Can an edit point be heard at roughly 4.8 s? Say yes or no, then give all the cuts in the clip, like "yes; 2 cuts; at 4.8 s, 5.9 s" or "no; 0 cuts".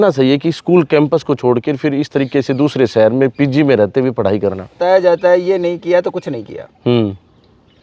yes; 1 cut; at 4.8 s